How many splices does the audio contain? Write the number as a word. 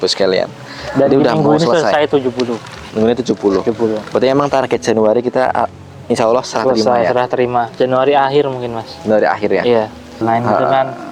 one